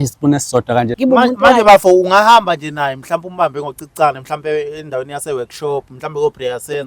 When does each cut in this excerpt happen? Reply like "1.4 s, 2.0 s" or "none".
0.9 s

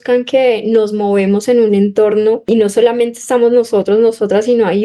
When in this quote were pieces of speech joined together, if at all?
2.5 s

